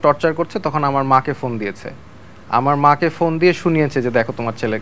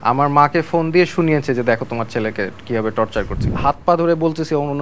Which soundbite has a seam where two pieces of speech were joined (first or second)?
second